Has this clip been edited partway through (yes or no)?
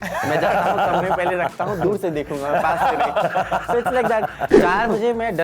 yes